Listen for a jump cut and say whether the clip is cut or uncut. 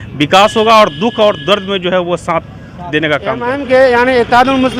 cut